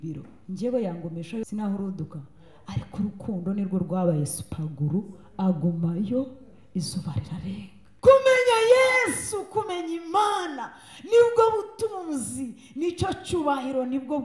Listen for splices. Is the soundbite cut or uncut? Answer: cut